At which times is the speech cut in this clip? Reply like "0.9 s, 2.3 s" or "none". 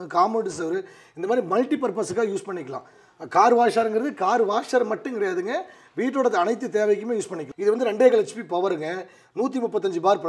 7.4 s